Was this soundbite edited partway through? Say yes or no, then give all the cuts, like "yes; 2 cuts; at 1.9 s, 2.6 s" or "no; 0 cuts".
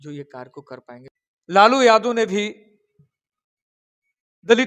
yes; 1 cut; at 1.0 s